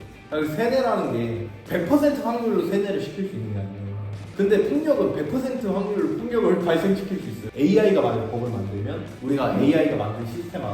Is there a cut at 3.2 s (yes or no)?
no